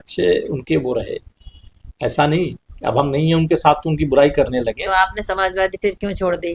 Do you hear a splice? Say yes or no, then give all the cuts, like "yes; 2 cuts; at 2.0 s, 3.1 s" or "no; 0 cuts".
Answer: no; 0 cuts